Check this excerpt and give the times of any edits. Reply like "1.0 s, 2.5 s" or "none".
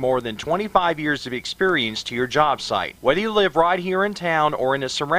none